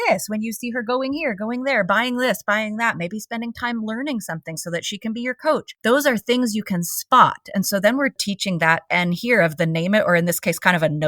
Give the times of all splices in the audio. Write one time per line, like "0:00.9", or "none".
0:05.7
0:08.2